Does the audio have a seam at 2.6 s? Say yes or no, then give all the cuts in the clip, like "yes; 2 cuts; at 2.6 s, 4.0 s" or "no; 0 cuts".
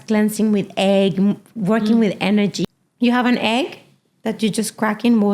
yes; 1 cut; at 2.6 s